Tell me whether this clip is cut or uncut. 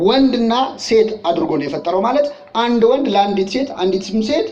uncut